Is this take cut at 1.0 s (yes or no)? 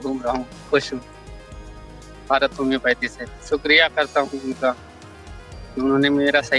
no